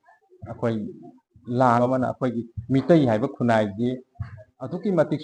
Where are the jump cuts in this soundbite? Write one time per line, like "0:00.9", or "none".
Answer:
0:01.8

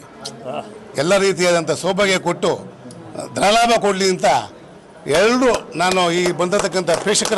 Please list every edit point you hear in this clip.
none

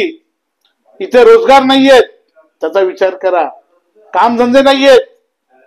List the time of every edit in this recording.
none

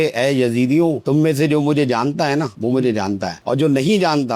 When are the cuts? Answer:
none

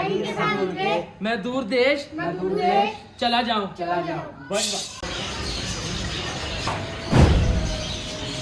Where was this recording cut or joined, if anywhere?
0:05.0

